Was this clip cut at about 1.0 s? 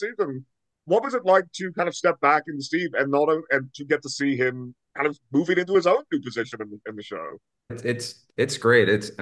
no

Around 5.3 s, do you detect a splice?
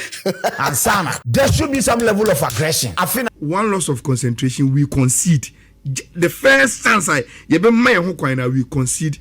no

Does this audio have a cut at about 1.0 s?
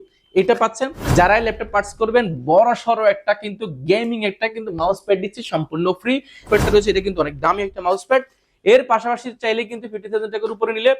yes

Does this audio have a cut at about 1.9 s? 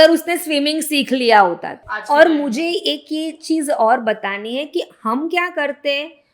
yes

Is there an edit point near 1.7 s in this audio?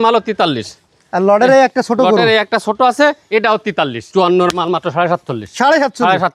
no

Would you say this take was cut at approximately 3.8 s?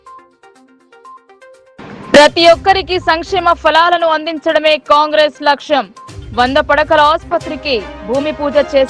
no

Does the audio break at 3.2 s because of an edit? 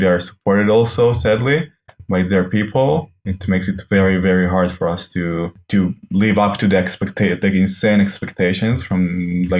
no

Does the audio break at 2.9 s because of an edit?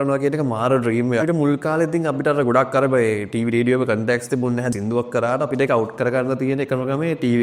no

